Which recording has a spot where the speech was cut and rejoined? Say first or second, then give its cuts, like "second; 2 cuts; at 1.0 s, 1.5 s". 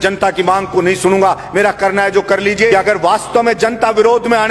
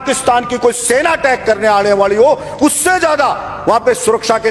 first; 1 cut; at 2.7 s